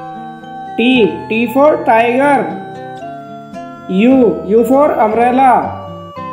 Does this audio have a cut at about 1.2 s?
no; 2 cuts; at 2.5 s, 3.8 s

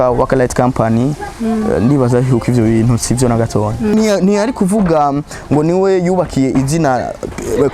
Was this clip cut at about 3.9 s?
yes; 1 cut; at 3.9 s

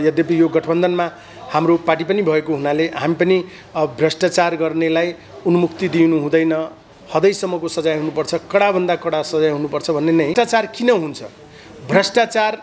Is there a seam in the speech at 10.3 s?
yes; 1 cut; at 10.3 s

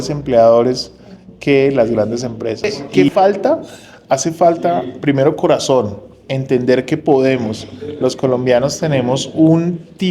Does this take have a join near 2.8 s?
yes; 1 cut; at 2.8 s

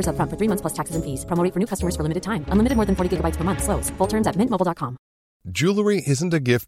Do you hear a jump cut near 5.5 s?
no; 0 cuts

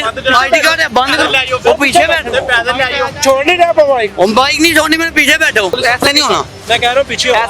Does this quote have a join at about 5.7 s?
yes; 1 cut; at 5.7 s

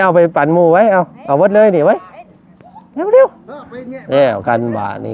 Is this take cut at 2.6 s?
no; 0 cuts

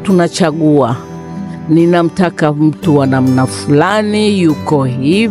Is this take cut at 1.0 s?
no; 0 cuts

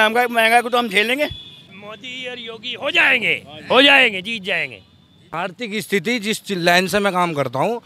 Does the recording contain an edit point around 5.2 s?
yes; 2 cuts; at 1.7 s, 5.2 s

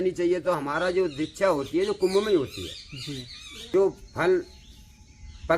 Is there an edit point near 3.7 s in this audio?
yes; 1 cut; at 3.7 s

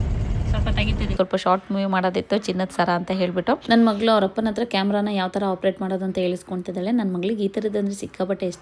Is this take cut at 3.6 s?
yes; 2 cuts; at 1.2 s, 3.6 s

